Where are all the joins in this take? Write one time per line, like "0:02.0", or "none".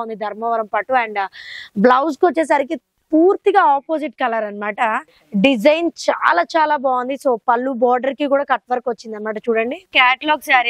0:05.1
0:09.9